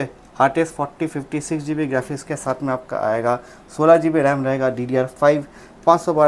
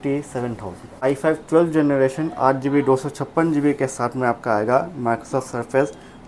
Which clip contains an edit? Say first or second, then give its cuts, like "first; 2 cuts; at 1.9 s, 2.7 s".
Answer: second; 1 cut; at 0.9 s